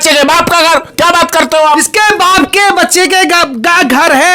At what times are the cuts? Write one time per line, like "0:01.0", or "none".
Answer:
none